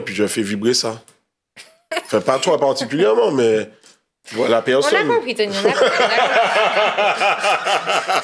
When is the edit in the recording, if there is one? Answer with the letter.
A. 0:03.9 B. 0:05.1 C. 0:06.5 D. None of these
D